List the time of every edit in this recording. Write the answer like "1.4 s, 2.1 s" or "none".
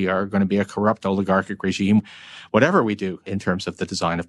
2.0 s, 3.3 s

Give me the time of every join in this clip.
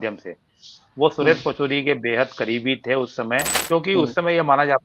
3.5 s

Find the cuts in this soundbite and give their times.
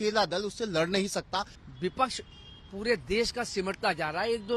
1.6 s

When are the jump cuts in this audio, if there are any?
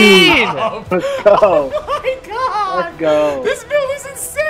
none

